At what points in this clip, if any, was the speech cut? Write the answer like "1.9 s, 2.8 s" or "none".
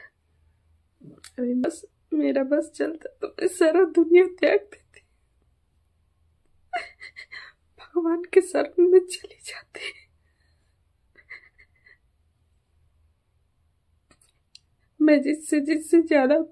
1.6 s